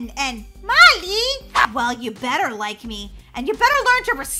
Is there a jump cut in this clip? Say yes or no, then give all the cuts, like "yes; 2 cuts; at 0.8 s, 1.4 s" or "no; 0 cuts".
yes; 1 cut; at 1.6 s